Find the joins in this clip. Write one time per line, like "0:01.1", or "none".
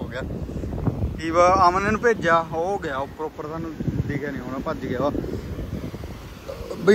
none